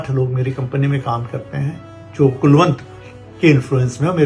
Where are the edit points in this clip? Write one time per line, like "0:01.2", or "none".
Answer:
none